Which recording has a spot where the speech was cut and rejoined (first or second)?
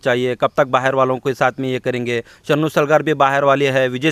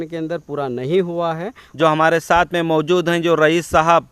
second